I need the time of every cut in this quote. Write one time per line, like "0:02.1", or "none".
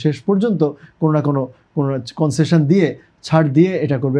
none